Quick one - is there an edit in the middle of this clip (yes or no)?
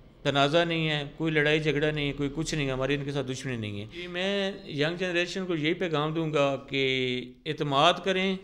yes